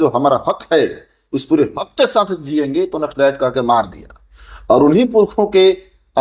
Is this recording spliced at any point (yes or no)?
no